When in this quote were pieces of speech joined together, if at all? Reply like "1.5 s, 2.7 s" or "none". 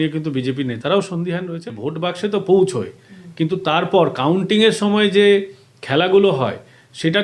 1.6 s